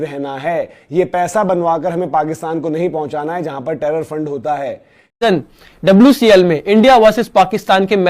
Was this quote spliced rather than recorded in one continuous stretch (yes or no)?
yes